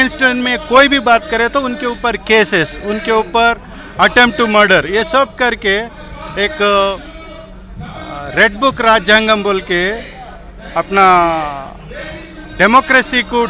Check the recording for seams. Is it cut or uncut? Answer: uncut